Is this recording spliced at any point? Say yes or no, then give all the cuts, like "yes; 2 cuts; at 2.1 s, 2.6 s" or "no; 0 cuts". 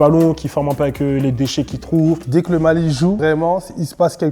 yes; 2 cuts; at 2.2 s, 3.2 s